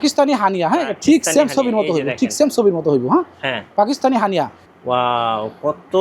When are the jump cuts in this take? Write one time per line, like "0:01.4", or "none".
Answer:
0:04.6